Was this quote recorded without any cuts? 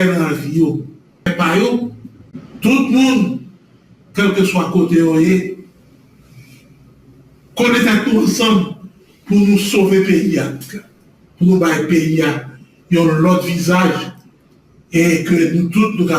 no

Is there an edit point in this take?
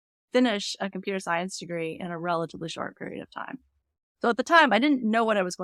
no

